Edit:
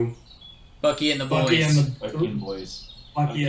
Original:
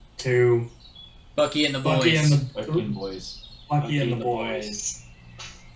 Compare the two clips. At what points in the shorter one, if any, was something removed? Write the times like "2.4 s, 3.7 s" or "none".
none